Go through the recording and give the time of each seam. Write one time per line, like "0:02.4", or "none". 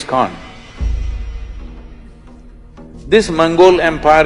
0:03.0